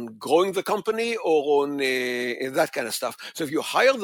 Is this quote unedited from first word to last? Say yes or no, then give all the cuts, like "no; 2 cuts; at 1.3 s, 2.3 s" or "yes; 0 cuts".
yes; 0 cuts